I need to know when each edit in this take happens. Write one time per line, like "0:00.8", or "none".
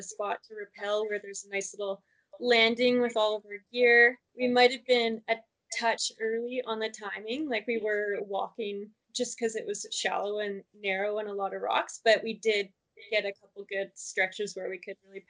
0:04.2
0:09.0